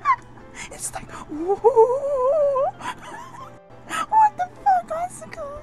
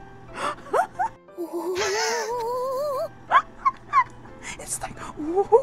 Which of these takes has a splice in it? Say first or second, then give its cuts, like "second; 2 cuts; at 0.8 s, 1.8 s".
first; 1 cut; at 3.6 s